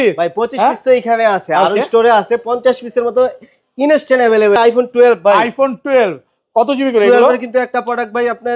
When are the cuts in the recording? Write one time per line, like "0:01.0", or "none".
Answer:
0:04.6

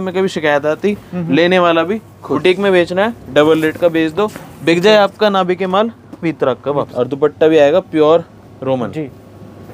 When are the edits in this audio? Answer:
0:02.4
0:06.9

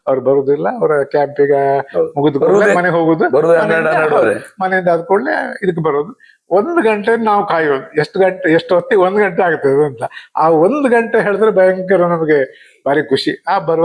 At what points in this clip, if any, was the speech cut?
none

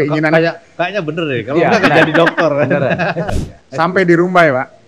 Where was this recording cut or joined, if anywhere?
0:03.3

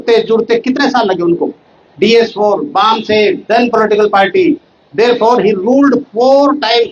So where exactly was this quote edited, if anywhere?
none

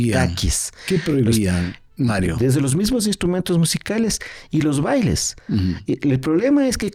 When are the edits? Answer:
none

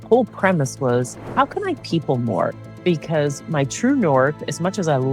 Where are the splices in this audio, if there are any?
0:02.7

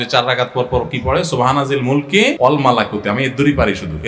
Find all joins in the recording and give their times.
0:02.4

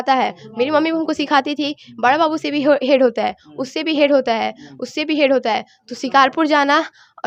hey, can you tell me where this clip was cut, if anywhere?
none

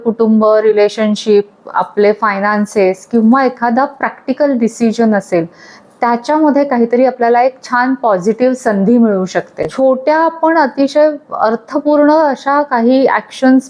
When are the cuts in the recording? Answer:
none

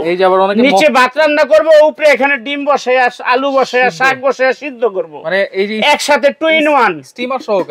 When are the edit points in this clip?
none

